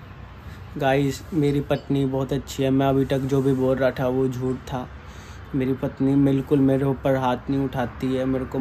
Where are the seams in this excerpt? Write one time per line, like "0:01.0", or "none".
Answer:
none